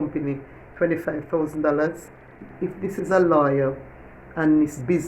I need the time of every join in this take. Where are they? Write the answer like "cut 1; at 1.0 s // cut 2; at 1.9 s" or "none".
cut 1; at 2.5 s